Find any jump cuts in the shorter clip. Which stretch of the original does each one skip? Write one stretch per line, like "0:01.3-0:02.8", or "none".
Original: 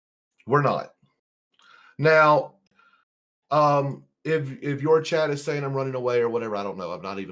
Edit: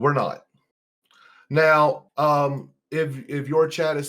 0:02.5-0:03.4